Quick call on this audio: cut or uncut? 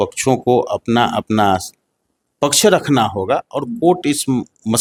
uncut